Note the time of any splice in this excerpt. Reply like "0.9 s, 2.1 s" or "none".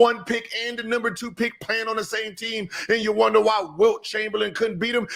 none

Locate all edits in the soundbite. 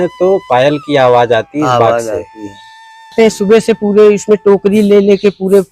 3.1 s

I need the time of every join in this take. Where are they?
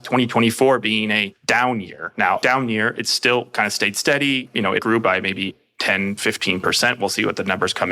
1.3 s, 2.4 s, 4.8 s, 5.7 s

